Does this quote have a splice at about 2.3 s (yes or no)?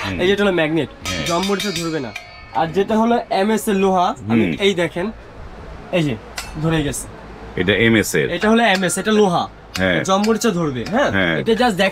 no